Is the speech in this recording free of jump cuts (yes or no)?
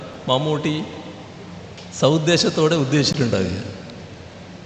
yes